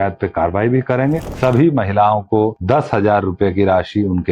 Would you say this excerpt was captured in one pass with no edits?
no; 2 cuts; at 1.3 s, 2.6 s

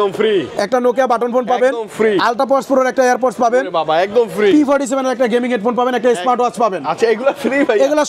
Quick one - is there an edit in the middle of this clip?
no; 0 cuts

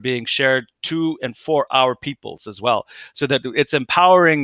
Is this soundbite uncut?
yes; 0 cuts

